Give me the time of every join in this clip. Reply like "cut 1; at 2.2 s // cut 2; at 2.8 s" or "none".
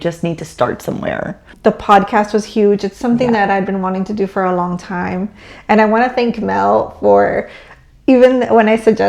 cut 1; at 1.5 s